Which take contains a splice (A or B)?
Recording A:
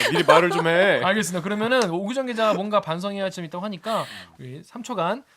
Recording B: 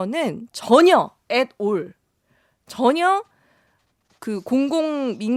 A